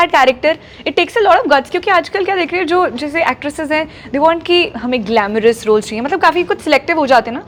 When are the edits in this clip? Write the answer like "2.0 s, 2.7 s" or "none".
none